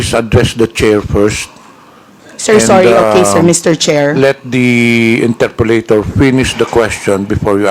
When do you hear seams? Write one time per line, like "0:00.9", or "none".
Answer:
none